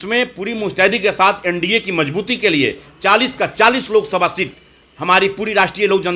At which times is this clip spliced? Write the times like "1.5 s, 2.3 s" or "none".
none